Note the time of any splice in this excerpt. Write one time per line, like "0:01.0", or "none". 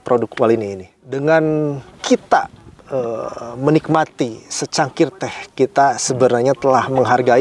0:01.2